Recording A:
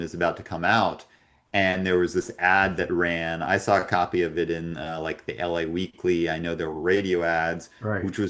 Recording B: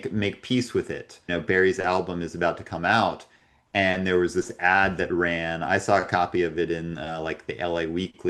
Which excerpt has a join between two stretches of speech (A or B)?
B